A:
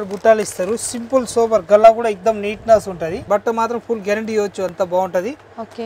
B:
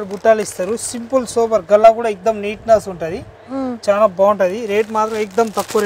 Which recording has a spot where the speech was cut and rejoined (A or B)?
A